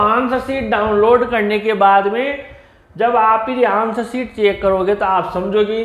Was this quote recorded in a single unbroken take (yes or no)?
yes